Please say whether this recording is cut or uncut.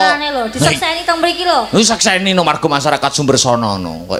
uncut